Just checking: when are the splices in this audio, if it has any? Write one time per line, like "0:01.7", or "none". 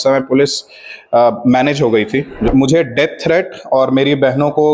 0:02.5